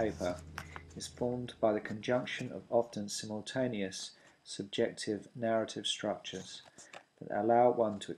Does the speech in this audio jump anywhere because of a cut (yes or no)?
no